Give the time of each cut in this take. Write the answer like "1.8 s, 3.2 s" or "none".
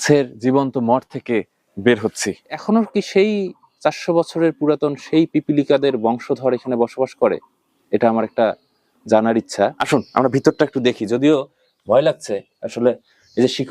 2.6 s, 9.8 s